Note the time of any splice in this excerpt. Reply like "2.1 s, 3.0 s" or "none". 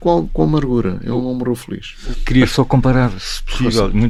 none